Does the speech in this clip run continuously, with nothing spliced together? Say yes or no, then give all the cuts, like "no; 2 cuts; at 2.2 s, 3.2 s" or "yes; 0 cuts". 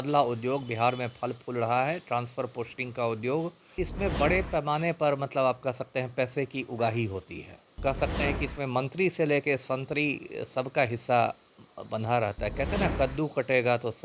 no; 2 cuts; at 3.8 s, 7.8 s